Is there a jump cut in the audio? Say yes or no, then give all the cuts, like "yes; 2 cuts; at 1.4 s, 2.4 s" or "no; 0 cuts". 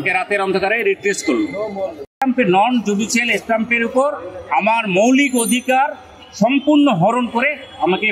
yes; 1 cut; at 2.0 s